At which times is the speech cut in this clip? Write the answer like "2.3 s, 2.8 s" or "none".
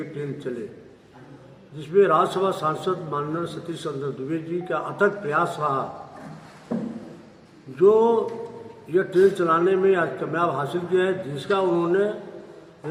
none